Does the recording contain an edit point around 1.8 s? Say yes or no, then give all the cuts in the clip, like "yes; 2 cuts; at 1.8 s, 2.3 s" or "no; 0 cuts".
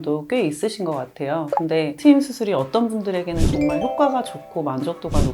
yes; 1 cut; at 1.8 s